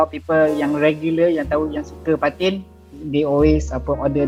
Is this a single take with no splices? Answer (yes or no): yes